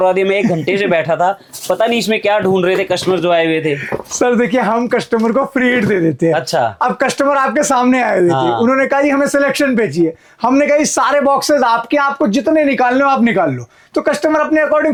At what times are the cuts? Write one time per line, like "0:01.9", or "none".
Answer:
none